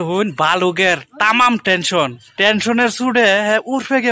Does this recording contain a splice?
no; 0 cuts

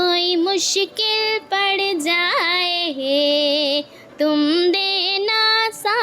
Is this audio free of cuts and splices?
yes; 0 cuts

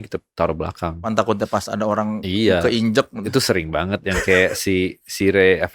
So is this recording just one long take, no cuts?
no; 1 cut; at 1.1 s

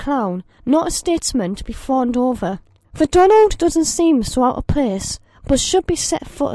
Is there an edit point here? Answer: no; 0 cuts

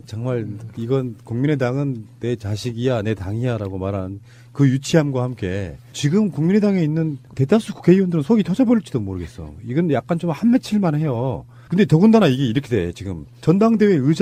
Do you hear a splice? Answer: no; 0 cuts

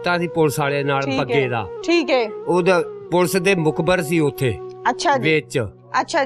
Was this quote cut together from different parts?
no; 0 cuts

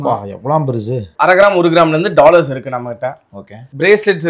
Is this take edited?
yes; 1 cut; at 1.1 s

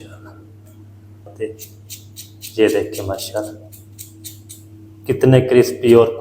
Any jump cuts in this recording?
yes; 1 cut; at 1.3 s

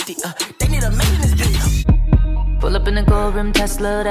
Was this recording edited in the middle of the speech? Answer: yes; 1 cut; at 1.8 s

